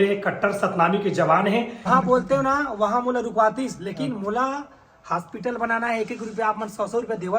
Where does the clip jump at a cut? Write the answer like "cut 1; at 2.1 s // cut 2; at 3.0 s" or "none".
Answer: cut 1; at 1.9 s